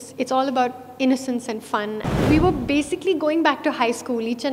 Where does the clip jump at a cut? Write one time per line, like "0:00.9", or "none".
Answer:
0:02.2